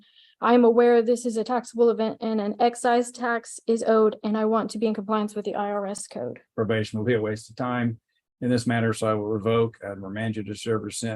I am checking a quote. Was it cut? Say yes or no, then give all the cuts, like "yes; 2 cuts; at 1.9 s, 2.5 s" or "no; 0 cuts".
yes; 1 cut; at 6.1 s